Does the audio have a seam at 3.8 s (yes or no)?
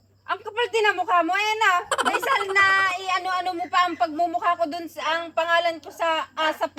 no